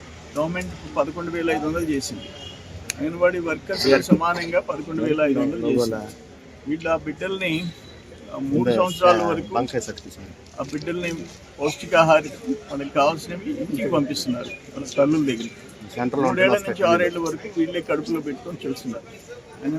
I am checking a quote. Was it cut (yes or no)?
no